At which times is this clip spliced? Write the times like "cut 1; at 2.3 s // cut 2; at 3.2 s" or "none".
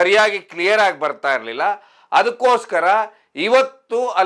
none